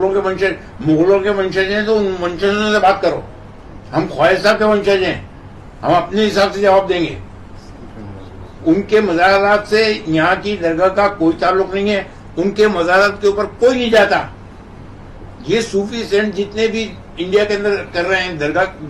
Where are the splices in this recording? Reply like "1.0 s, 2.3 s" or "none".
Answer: none